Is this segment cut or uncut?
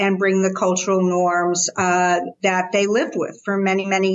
uncut